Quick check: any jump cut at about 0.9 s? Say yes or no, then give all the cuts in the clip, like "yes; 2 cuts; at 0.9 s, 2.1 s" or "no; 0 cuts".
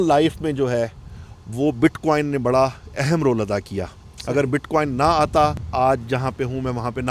no; 1 cut; at 5.6 s